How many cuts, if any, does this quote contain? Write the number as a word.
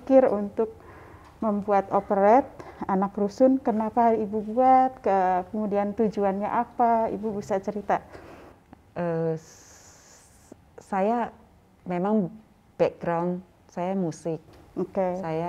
zero